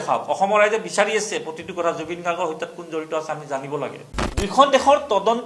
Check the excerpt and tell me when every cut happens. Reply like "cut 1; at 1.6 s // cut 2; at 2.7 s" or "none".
cut 1; at 4.2 s